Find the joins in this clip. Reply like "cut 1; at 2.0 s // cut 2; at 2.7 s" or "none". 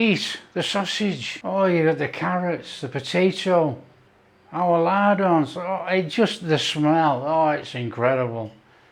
cut 1; at 1.3 s